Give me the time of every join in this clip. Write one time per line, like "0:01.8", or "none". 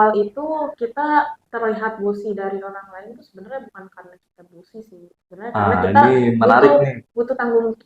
none